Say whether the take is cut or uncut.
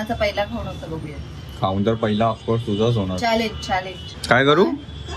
cut